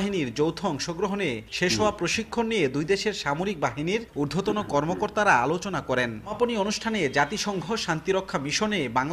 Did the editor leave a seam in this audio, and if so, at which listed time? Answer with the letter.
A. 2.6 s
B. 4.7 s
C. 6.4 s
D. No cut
C